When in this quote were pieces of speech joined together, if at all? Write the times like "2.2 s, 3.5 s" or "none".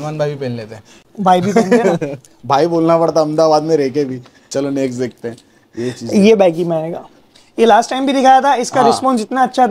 none